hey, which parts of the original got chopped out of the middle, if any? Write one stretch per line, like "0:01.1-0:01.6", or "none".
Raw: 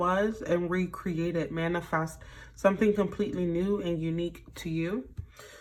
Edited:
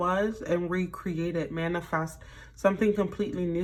none